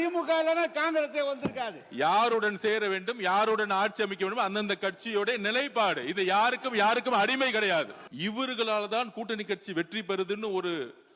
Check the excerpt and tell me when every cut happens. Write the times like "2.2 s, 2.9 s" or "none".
1.8 s, 8.0 s